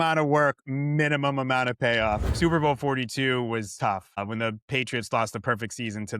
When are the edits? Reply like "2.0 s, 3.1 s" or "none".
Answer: 2.3 s, 4.2 s